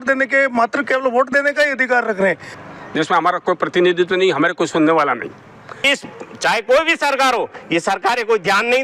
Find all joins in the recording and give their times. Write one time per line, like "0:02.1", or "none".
0:02.5
0:05.8